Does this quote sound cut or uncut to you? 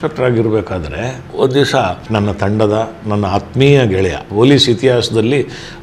cut